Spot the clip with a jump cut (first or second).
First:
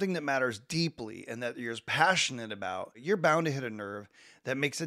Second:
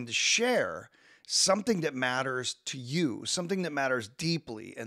first